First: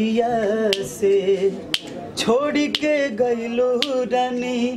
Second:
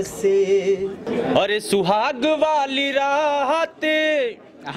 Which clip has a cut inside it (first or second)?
second